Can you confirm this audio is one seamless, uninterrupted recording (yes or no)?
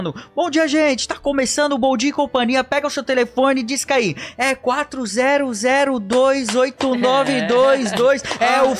yes